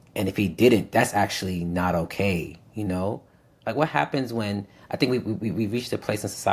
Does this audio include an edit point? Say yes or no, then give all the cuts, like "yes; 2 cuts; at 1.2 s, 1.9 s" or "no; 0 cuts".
no; 0 cuts